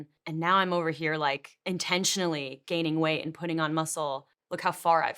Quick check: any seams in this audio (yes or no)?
yes